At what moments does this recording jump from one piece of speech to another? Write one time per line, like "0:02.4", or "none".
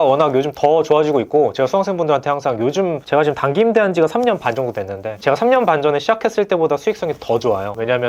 none